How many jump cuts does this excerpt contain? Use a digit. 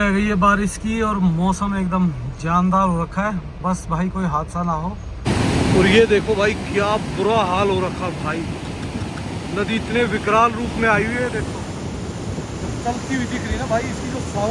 1